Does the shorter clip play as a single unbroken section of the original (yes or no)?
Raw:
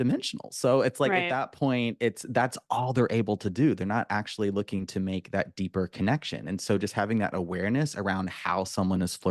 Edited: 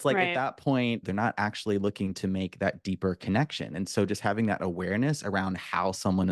no